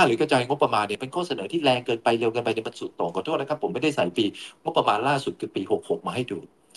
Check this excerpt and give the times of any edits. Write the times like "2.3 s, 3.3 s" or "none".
0.9 s